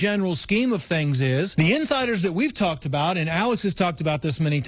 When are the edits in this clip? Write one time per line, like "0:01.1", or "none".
0:01.5